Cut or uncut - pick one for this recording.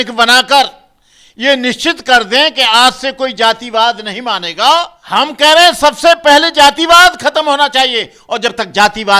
cut